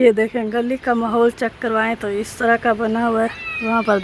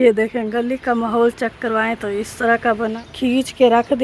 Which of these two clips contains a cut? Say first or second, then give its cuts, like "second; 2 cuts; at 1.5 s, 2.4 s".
second; 1 cut; at 2.9 s